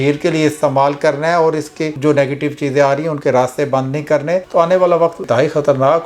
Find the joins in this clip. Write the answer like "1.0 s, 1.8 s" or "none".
1.9 s